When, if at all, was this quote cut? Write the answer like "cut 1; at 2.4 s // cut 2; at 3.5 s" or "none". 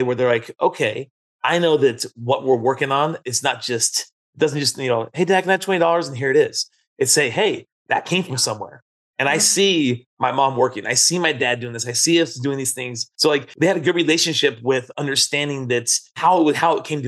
cut 1; at 13.3 s // cut 2; at 16.1 s